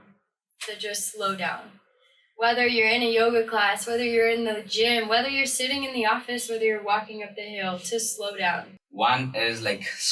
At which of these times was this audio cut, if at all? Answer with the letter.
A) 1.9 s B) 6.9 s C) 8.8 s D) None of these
C